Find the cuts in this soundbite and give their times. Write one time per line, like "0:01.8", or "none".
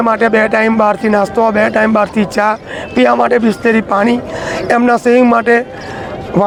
none